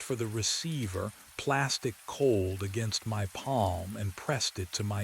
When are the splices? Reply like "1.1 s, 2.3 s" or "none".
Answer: 3.6 s